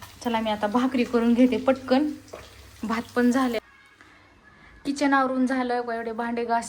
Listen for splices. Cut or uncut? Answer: cut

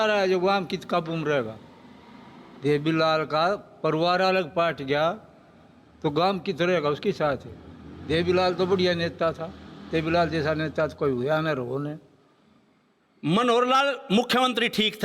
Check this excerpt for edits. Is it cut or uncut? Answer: uncut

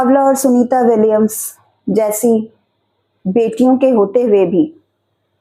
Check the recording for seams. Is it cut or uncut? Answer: uncut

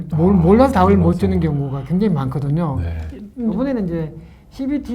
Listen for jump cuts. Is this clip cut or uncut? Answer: cut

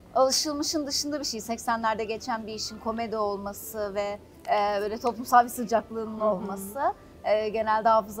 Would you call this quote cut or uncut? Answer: uncut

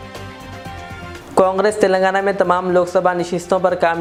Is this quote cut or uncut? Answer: uncut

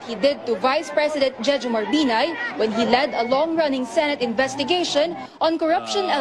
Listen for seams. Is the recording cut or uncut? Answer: cut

